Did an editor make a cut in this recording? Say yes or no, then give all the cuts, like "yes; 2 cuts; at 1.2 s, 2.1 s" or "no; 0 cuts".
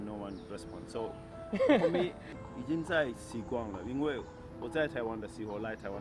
no; 0 cuts